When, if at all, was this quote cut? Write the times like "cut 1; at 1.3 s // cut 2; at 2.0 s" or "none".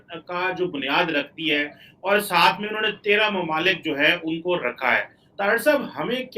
cut 1; at 5.2 s